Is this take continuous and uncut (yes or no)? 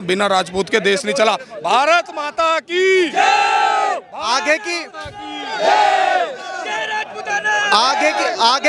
yes